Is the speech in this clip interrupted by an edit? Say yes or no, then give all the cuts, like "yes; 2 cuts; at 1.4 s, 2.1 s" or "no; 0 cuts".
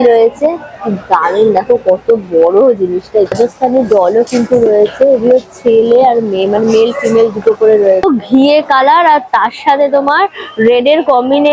yes; 2 cuts; at 3.3 s, 8.0 s